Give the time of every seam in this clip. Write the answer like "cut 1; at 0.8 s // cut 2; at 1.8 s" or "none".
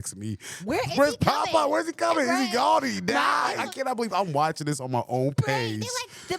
cut 1; at 3.6 s